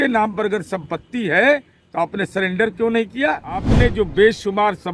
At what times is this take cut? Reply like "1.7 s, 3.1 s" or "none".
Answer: 3.7 s